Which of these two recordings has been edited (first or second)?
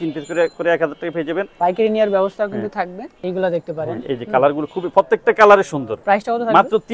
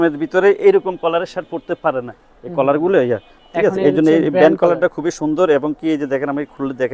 first